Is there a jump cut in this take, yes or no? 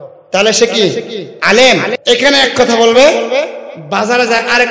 yes